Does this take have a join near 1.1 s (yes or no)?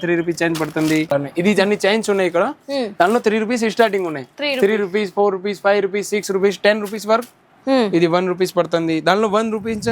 yes